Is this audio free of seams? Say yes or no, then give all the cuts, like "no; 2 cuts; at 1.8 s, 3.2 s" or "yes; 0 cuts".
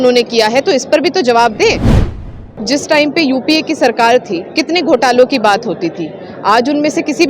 no; 1 cut; at 2.1 s